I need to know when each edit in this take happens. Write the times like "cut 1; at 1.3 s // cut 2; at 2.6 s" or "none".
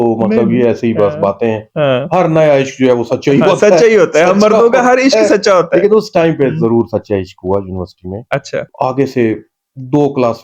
cut 1; at 8.7 s